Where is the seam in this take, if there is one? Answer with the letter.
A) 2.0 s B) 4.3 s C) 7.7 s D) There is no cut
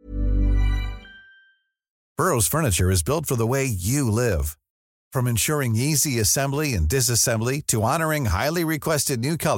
A